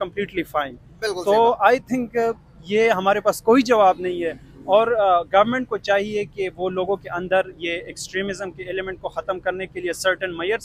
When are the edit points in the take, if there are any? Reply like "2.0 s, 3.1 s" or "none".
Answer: none